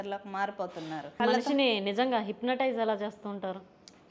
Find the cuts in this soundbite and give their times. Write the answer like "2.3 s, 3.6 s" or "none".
1.2 s